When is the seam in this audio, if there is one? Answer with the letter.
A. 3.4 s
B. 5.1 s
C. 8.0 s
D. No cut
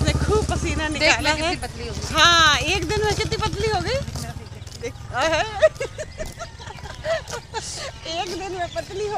D